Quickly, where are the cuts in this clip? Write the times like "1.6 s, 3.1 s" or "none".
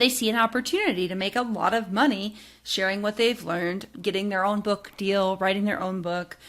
3.9 s